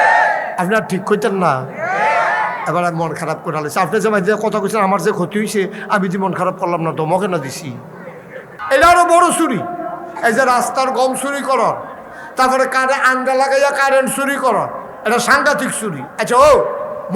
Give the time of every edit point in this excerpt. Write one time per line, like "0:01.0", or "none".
0:08.5